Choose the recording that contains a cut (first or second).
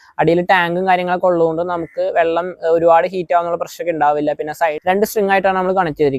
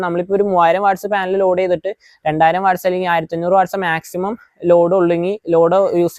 first